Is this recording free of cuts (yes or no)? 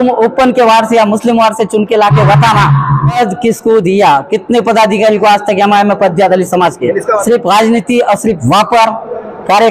no